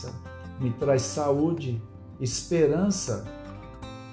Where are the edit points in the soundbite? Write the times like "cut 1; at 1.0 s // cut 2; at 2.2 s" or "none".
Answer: cut 1; at 3.2 s